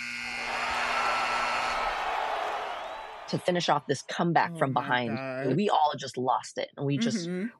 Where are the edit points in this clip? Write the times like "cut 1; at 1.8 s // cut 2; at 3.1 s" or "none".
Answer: cut 1; at 5.5 s

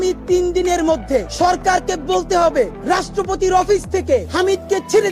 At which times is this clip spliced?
cut 1; at 1.3 s // cut 2; at 2.8 s // cut 3; at 4.3 s

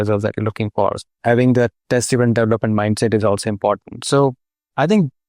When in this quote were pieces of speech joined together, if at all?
cut 1; at 1.1 s

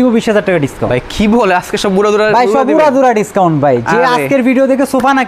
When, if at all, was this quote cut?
none

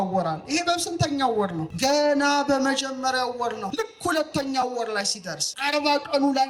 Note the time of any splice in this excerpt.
cut 1; at 1.7 s // cut 2; at 3.6 s // cut 3; at 5.4 s

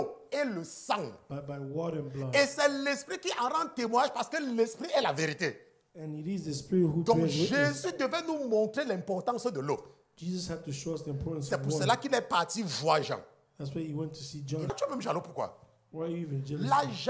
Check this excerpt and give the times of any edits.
cut 1; at 14.7 s

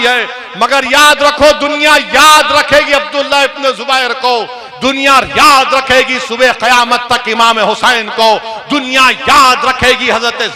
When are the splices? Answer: none

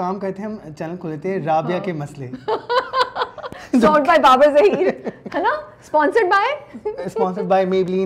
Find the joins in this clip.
none

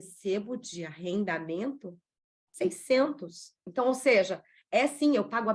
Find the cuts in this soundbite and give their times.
cut 1; at 3.6 s

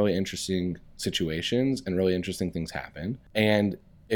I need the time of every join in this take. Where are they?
cut 1; at 3.2 s

